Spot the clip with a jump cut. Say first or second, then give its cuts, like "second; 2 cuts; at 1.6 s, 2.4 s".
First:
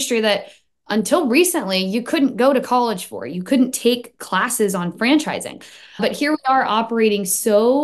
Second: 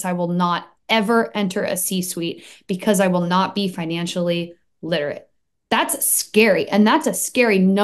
first; 1 cut; at 6.0 s